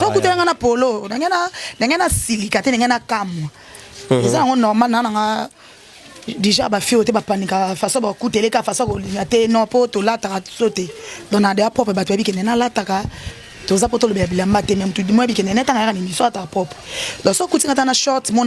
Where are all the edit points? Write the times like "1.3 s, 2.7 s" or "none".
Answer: none

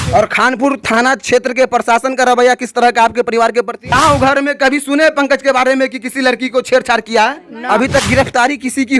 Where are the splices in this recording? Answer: 3.9 s, 7.5 s

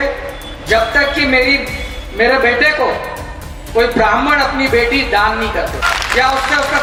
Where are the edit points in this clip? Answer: none

